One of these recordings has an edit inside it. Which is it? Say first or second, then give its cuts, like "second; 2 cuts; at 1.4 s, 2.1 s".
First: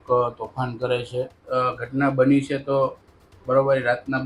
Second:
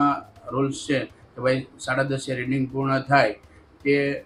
first; 1 cut; at 1.4 s